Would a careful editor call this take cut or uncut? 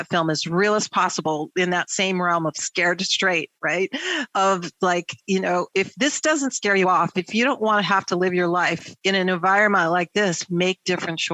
cut